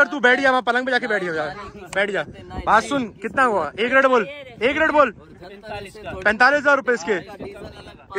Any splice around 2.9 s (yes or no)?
no